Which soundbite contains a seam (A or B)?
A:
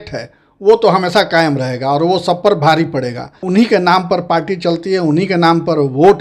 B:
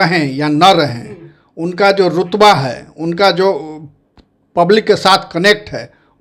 A